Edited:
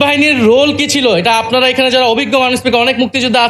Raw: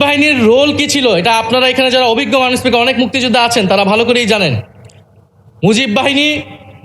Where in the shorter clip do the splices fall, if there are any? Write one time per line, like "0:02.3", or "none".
none

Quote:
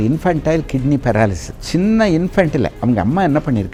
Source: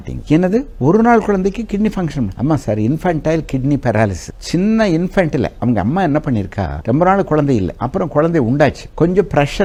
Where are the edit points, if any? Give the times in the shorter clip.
none

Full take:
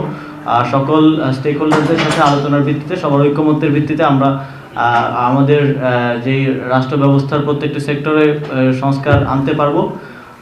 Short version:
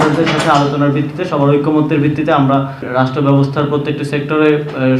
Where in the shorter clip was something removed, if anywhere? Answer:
0:02.9

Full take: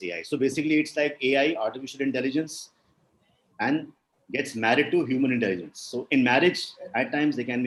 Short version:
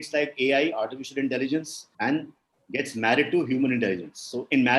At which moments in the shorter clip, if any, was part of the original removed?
0:01.8

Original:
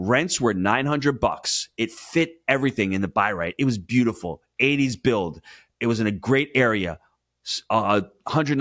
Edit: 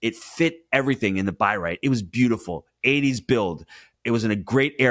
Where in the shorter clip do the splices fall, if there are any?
none

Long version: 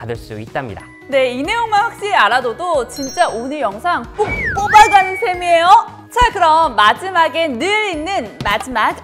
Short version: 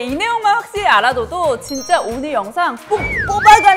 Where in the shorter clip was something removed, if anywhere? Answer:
none

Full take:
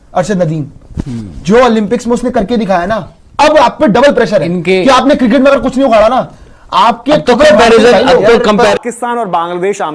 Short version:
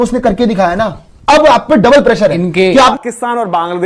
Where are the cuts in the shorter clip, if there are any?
0:02.9

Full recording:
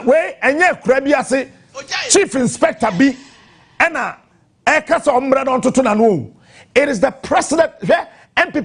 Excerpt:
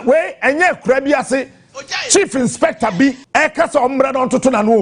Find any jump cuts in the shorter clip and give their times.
0:03.2

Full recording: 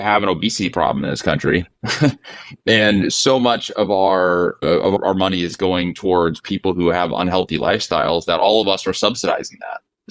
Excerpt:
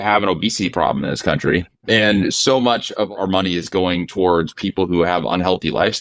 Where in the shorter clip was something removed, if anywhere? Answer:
0:01.7
0:03.1

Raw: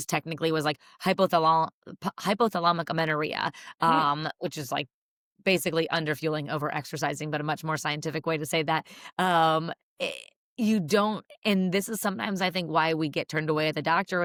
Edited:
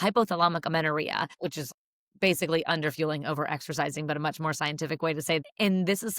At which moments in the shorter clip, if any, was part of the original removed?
0:01.6
0:05.4

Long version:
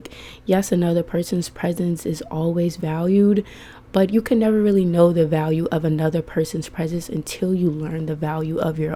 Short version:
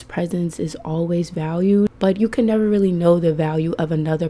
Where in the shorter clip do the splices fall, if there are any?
0:01.9

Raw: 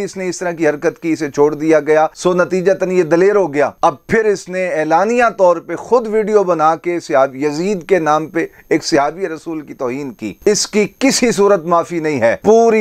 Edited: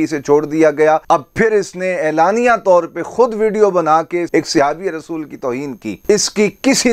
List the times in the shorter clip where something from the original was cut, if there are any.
0:01.0
0:04.3

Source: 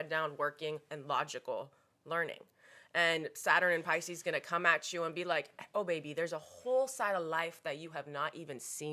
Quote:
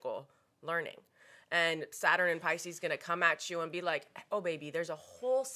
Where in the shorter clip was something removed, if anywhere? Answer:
none

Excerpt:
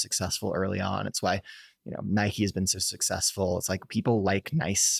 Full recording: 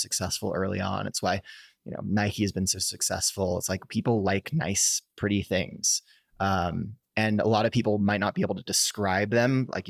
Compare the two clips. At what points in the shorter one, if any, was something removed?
none

